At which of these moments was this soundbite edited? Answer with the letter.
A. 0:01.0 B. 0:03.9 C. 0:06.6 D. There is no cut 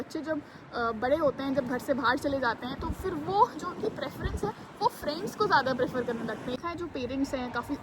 C